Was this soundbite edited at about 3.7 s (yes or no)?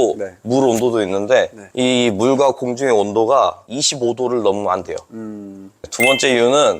no